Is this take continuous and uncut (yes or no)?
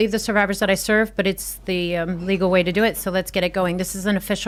yes